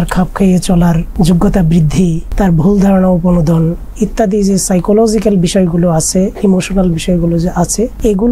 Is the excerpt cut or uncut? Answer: cut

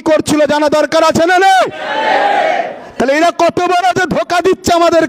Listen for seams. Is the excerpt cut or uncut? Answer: uncut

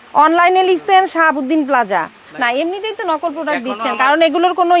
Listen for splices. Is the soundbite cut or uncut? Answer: cut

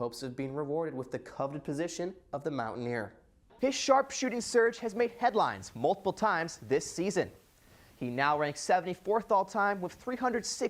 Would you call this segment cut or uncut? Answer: cut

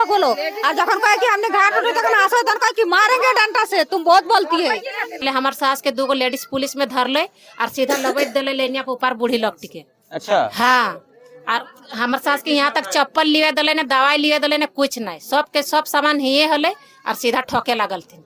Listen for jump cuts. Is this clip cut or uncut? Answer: cut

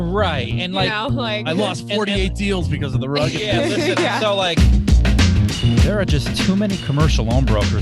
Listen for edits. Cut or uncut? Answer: cut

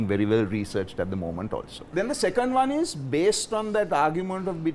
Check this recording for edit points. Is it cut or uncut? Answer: cut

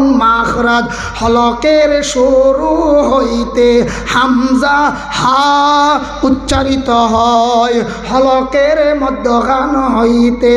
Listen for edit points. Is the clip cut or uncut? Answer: uncut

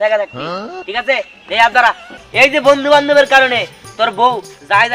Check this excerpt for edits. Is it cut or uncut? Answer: cut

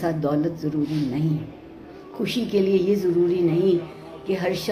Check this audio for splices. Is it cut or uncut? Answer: uncut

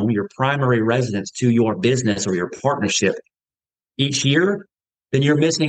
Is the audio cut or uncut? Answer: uncut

